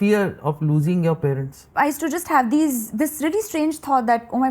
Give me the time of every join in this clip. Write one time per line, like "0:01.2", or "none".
0:01.7